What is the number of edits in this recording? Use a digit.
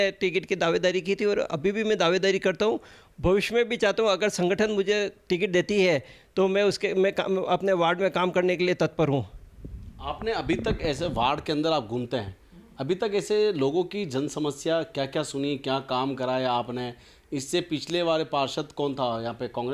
0